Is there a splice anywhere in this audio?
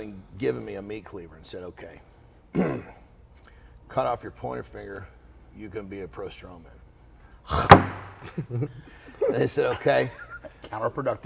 no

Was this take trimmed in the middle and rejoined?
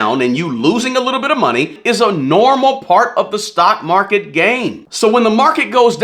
no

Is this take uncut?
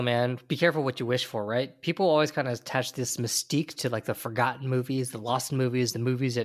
yes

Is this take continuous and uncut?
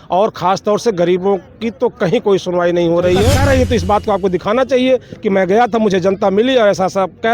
no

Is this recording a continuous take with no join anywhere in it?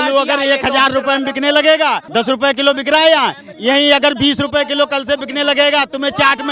no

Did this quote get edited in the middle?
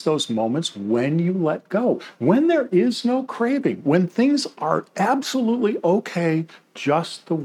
no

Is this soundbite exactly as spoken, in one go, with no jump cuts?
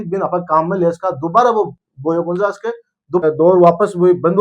no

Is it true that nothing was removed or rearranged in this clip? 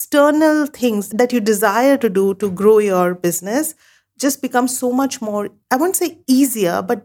no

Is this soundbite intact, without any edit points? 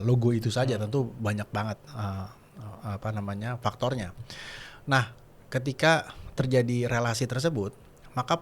yes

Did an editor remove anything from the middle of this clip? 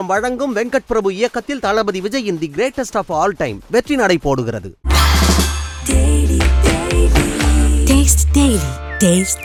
no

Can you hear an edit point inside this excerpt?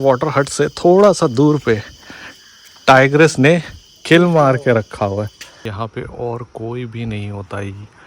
yes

